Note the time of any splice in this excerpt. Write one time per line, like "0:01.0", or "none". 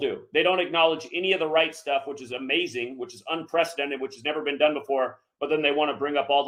none